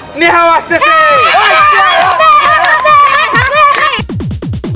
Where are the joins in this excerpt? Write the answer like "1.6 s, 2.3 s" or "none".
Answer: none